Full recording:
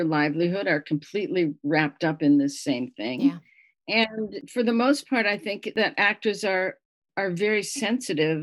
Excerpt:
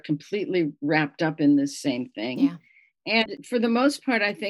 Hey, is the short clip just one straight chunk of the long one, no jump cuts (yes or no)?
no